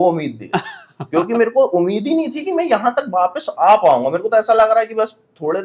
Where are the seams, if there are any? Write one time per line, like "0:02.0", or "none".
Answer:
none